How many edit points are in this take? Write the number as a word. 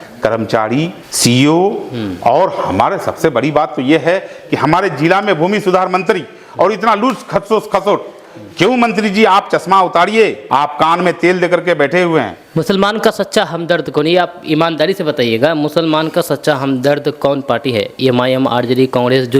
three